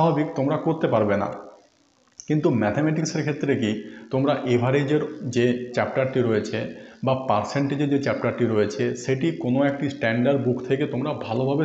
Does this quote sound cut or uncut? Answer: uncut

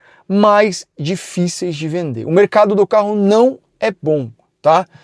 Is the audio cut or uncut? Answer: uncut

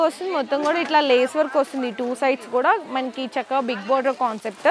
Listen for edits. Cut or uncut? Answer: uncut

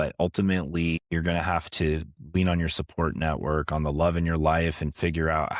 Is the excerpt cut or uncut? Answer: cut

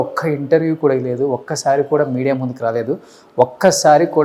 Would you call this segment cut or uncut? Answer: uncut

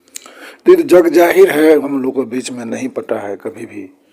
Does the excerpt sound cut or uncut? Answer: cut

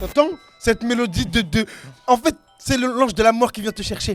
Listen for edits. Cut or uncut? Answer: uncut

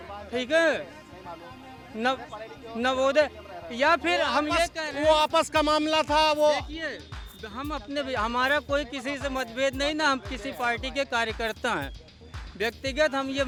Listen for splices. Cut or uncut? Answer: uncut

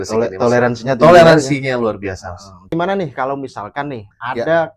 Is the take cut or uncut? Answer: cut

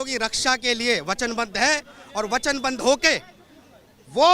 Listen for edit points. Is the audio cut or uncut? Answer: uncut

